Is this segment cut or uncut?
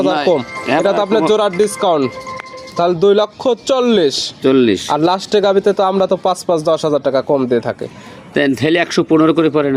uncut